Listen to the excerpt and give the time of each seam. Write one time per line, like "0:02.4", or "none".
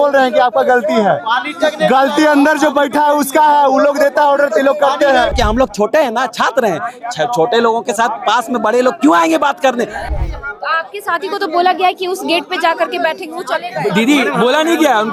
0:05.3
0:10.0